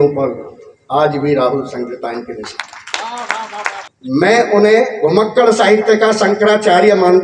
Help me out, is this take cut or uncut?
cut